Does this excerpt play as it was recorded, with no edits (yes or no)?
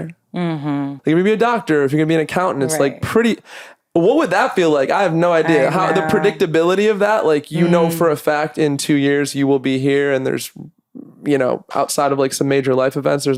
yes